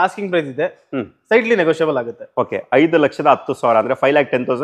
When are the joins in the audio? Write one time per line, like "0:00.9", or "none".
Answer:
none